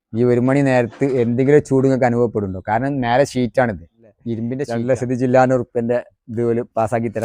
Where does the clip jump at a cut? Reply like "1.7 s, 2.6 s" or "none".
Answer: 4.6 s